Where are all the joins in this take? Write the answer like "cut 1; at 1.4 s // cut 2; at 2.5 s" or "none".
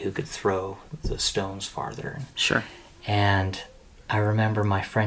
none